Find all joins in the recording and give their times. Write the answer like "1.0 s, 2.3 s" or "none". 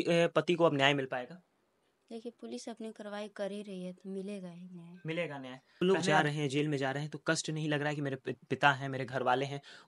5.8 s